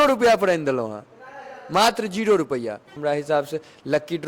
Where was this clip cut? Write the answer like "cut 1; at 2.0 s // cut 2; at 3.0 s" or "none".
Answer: cut 1; at 2.9 s